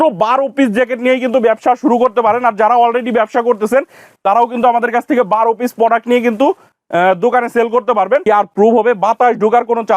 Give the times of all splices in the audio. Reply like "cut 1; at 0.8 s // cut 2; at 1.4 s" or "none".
cut 1; at 8.2 s